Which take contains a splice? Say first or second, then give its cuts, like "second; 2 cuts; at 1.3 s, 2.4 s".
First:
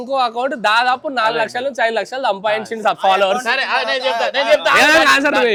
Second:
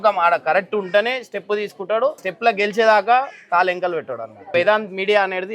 second; 2 cuts; at 2.3 s, 4.5 s